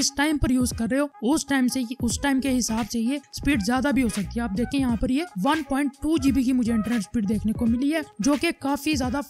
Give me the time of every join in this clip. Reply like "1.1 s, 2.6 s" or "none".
none